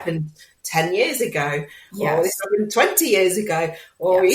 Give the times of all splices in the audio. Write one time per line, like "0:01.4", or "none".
none